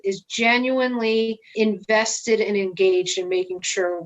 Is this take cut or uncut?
cut